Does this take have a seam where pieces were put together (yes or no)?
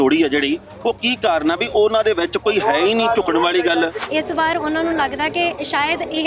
yes